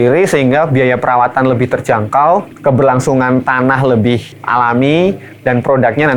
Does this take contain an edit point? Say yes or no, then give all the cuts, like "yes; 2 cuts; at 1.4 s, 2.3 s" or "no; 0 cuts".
yes; 2 cuts; at 2.5 s, 4.3 s